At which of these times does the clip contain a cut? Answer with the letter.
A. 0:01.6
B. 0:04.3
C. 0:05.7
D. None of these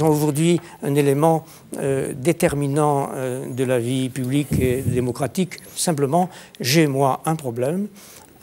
C